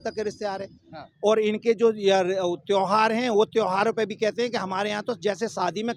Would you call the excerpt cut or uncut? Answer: uncut